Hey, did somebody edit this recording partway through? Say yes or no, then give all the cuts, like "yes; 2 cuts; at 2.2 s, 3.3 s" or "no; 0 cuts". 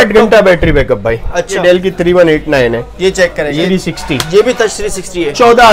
yes; 2 cuts; at 1.6 s, 3.6 s